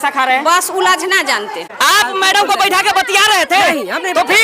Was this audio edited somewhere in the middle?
yes; 1 cut; at 1.6 s

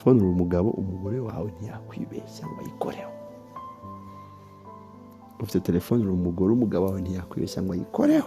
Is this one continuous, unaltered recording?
yes; 0 cuts

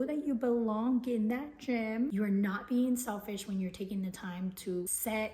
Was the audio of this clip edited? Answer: yes; 1 cut; at 2.1 s

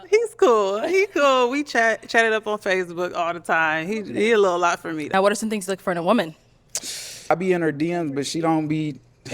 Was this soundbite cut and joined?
yes; 2 cuts; at 5.1 s, 7.3 s

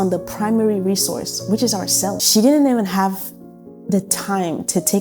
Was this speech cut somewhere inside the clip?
yes; 1 cut; at 2.2 s

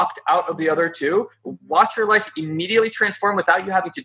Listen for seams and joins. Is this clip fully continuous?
yes; 0 cuts

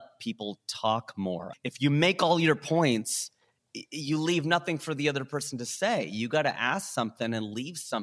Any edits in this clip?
yes; 1 cut; at 1.5 s

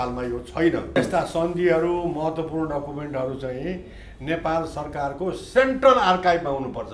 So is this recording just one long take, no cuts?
no; 1 cut; at 1.0 s

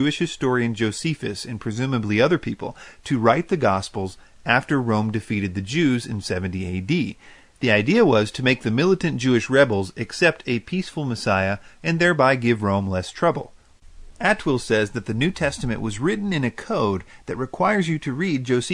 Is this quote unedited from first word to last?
no; 1 cut; at 5.5 s

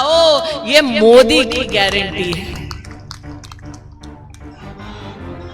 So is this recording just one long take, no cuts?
yes; 0 cuts

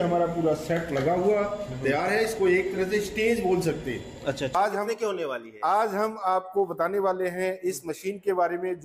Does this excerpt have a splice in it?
yes; 1 cut; at 4.6 s

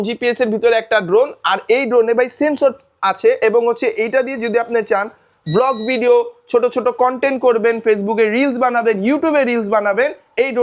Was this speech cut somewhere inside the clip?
no; 0 cuts

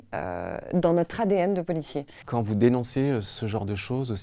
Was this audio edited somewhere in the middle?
yes; 1 cut; at 2.1 s

